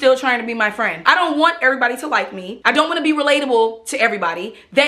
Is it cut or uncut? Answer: cut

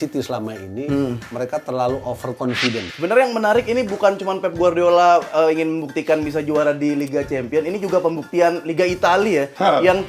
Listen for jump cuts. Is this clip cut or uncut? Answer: cut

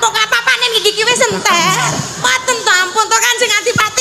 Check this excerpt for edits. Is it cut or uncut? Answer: cut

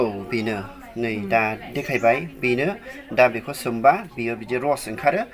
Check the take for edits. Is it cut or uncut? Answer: uncut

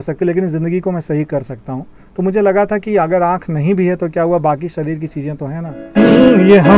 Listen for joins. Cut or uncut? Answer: cut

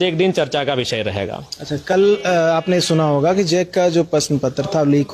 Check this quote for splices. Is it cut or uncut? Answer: uncut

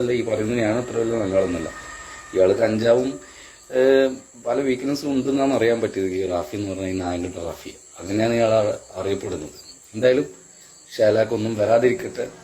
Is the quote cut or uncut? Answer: uncut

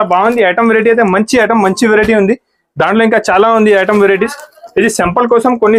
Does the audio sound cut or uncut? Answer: uncut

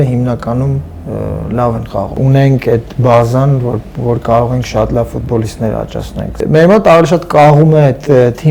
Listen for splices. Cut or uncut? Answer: cut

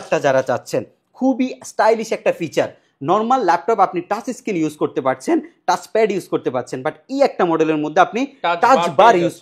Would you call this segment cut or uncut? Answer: uncut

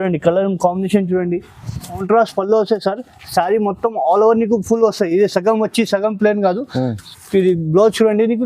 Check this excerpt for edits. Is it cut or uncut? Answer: cut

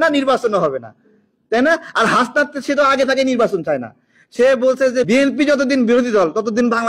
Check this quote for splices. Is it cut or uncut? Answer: cut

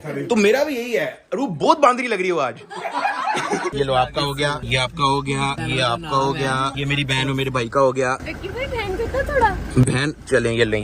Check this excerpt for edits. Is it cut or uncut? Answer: cut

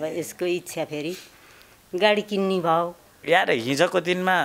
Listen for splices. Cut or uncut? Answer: cut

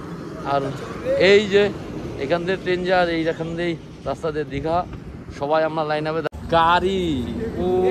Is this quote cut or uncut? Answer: cut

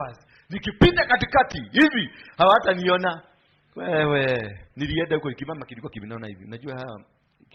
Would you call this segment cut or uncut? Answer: uncut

